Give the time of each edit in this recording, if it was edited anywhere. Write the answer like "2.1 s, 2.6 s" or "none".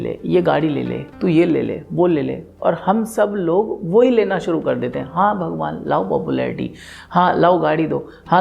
none